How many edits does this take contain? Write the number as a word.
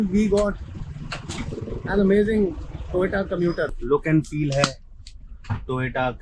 one